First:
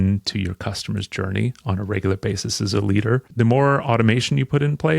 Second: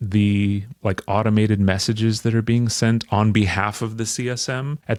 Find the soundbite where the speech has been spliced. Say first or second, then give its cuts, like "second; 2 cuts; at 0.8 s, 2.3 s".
first; 1 cut; at 3.3 s